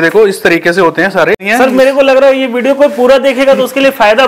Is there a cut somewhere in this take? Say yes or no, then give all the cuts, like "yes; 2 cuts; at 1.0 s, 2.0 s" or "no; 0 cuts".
yes; 1 cut; at 1.5 s